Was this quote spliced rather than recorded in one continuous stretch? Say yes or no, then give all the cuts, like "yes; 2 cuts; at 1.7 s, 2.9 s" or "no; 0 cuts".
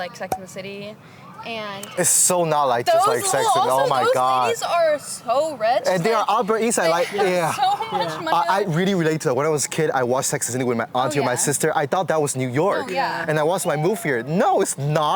no; 0 cuts